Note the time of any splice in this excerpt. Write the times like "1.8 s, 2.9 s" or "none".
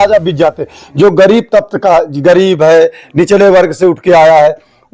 none